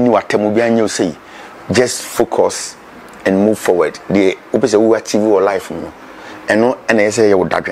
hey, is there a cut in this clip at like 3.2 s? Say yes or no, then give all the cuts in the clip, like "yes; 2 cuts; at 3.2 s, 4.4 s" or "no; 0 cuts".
no; 0 cuts